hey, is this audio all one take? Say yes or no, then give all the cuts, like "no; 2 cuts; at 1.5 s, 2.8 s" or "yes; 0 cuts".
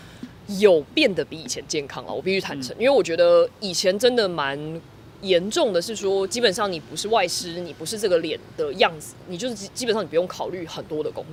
yes; 0 cuts